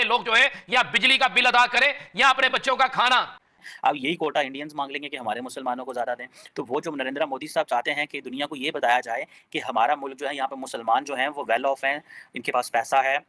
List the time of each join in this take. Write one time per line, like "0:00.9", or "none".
0:03.5